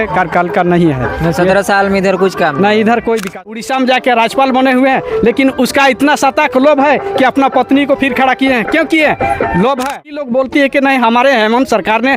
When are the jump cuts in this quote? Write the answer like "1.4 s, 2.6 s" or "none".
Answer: 3.6 s, 10.2 s